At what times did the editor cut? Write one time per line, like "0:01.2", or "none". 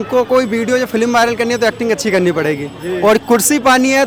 none